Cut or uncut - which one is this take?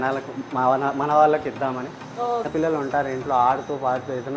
cut